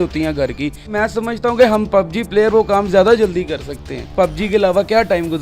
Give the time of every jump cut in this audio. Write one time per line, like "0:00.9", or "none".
0:00.9
0:04.0